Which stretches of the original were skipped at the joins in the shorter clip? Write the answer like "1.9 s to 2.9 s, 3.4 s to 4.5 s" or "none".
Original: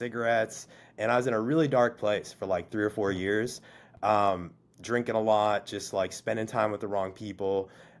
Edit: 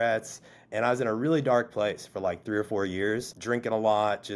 3.6 s to 4.8 s